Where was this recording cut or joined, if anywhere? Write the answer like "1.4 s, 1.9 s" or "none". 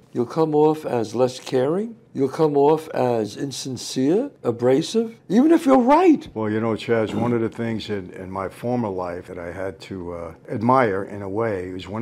6.3 s, 9.3 s, 10.4 s